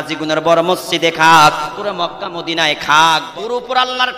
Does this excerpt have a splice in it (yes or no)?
yes